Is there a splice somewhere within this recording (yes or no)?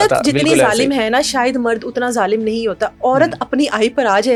no